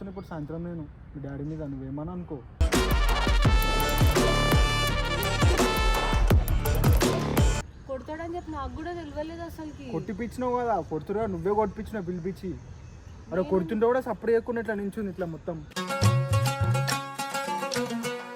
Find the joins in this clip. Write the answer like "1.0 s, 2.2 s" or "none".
7.7 s